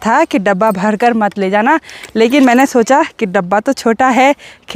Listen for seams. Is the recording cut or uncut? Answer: uncut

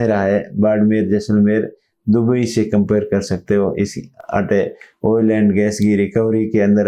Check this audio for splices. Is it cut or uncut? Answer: uncut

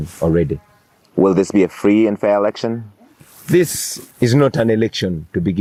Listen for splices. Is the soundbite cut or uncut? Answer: uncut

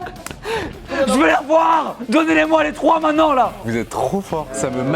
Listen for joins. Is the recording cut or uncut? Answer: cut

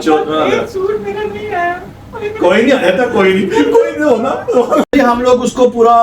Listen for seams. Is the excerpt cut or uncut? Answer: cut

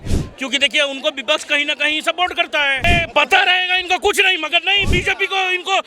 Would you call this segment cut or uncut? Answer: cut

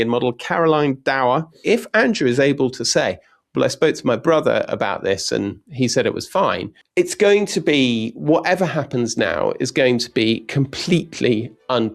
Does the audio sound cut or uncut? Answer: cut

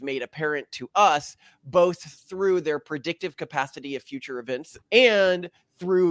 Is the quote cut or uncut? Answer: cut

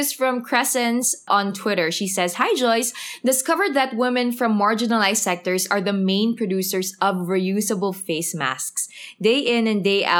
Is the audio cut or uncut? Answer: cut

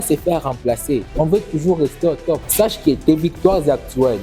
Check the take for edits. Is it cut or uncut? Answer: cut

